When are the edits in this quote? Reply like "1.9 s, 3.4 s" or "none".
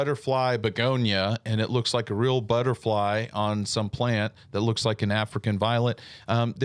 none

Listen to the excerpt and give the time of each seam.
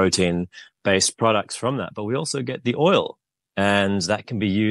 none

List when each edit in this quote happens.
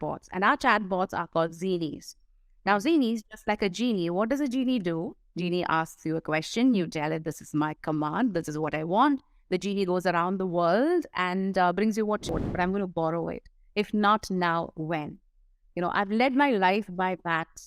12.3 s

